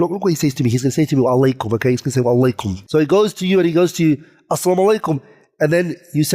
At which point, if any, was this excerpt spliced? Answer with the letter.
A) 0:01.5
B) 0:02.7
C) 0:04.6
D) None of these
B